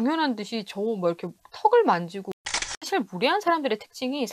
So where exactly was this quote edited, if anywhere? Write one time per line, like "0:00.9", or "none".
0:02.4